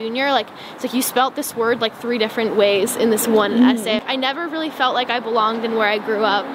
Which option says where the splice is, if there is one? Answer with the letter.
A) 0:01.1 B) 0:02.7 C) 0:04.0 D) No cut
C